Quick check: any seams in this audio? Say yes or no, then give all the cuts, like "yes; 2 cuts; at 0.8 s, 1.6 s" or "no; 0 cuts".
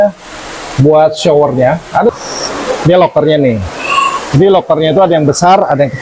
yes; 1 cut; at 2.1 s